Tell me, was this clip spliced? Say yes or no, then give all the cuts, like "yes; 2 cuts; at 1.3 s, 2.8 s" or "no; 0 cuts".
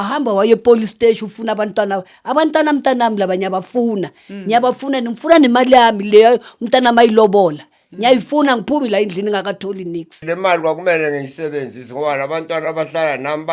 yes; 1 cut; at 10.2 s